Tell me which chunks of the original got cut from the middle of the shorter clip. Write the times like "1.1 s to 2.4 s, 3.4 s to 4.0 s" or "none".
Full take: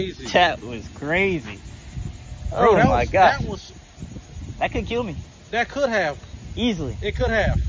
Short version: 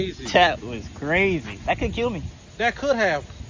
1.5 s to 4.5 s

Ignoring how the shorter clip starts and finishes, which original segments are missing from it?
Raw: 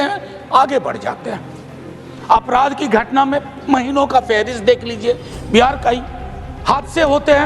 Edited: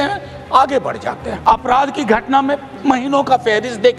1.3 s to 2.1 s

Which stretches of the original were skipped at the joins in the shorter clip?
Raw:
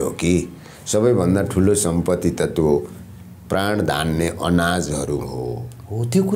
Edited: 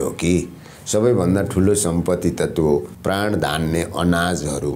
2.9 s to 3.4 s

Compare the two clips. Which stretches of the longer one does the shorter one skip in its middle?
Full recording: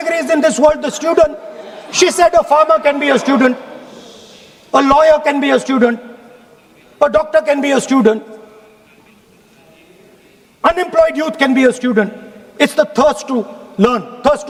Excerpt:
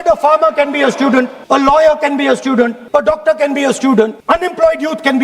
3.6 s to 4.6 s, 6.0 s to 6.9 s, 8.2 s to 10.5 s

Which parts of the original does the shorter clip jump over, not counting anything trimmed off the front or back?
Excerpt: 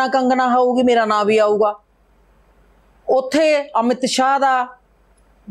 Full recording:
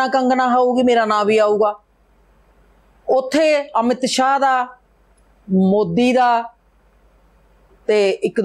none

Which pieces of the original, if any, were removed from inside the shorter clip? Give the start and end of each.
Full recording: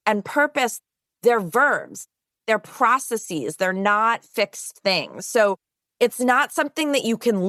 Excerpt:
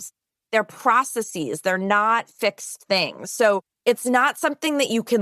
5.7 s to 5.8 s

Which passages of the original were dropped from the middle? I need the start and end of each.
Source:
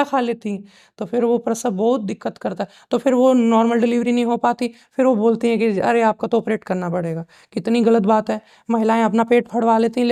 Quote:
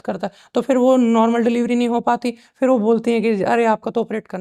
none

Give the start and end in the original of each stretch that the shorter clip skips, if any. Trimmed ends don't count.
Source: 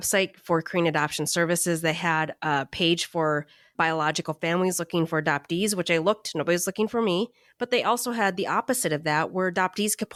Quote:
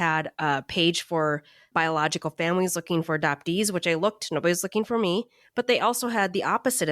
none

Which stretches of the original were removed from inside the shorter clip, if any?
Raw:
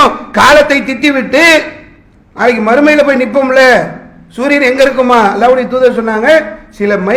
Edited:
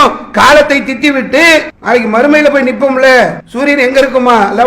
1.7 s to 2.3 s, 4.0 s to 4.3 s

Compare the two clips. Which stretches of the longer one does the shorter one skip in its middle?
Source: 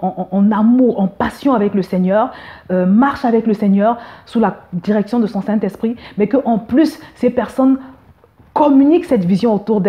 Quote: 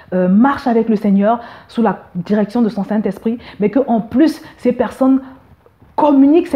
none

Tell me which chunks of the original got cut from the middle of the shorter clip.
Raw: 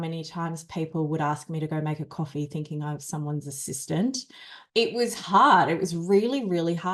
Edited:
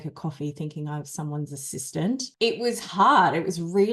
4.2 s to 4.6 s

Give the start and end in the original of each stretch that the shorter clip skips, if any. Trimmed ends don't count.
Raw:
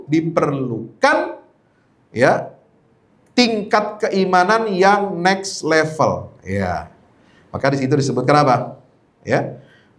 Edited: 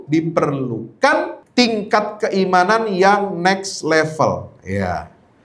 1.4 s to 3.2 s

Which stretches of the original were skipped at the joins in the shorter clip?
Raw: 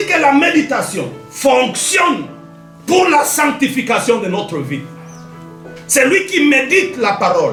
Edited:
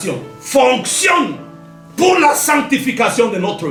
none

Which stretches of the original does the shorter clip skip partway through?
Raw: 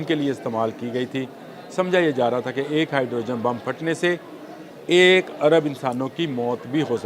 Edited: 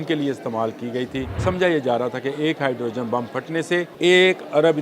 1.3 s to 1.6 s, 4.2 s to 4.8 s

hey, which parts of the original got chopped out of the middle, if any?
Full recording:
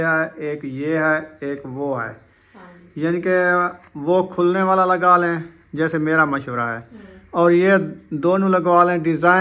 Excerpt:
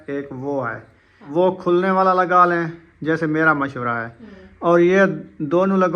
2.5 s to 3.9 s

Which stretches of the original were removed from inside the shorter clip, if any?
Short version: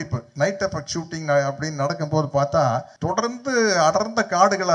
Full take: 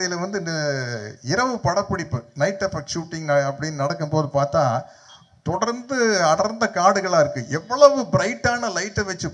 4.9 s to 5.4 s

